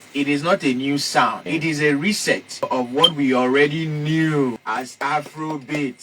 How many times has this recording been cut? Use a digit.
3